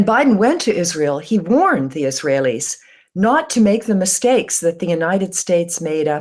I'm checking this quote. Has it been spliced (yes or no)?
no